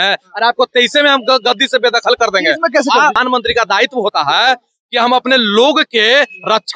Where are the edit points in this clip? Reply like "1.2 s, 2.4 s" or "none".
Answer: 3.2 s